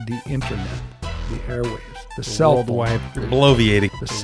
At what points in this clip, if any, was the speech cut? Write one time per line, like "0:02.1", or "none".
none